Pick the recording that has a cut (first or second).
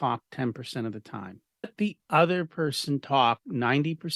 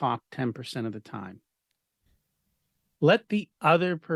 first